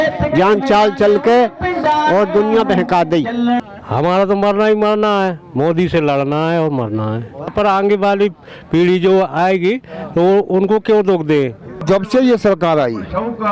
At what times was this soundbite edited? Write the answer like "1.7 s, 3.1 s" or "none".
3.6 s, 7.5 s, 11.8 s